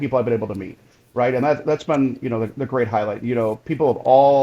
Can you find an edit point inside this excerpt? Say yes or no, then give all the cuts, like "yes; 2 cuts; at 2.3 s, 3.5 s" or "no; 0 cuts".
no; 0 cuts